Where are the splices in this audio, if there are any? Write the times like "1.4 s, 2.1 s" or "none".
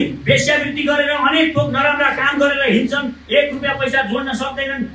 none